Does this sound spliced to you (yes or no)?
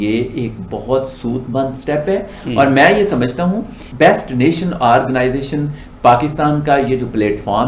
no